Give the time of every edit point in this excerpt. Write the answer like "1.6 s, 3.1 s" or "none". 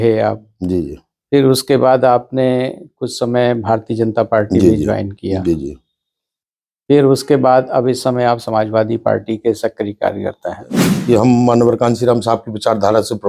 10.8 s

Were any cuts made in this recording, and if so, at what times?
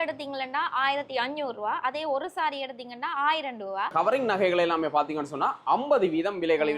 3.9 s

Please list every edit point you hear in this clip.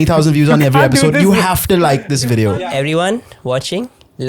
2.5 s

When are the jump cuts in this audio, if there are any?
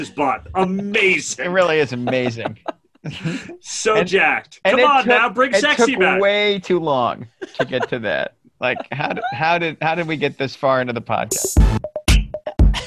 8.4 s

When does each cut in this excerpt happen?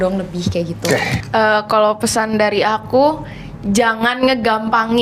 1.2 s

